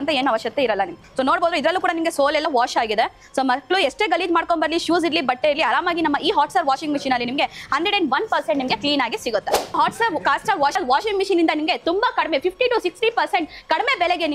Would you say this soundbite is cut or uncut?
cut